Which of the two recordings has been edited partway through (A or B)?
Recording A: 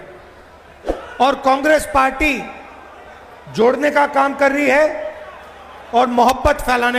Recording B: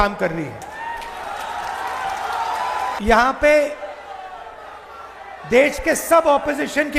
B